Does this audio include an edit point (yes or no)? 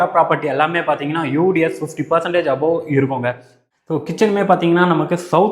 yes